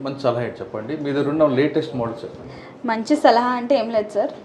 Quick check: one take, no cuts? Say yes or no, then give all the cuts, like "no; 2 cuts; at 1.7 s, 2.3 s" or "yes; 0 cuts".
yes; 0 cuts